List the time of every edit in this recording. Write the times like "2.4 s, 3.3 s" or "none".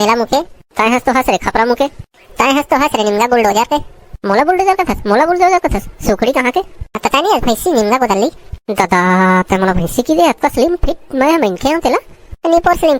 none